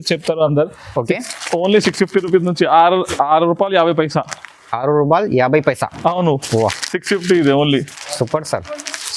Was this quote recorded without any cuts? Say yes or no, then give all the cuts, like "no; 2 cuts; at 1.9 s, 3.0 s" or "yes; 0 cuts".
yes; 0 cuts